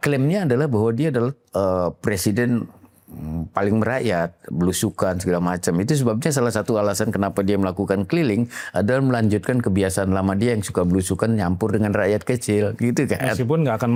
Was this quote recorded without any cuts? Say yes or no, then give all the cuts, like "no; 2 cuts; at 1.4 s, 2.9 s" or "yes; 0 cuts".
yes; 0 cuts